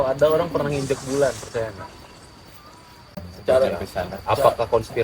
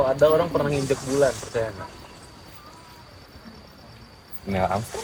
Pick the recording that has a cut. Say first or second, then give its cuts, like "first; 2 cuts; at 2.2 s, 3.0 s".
first; 1 cut; at 3.1 s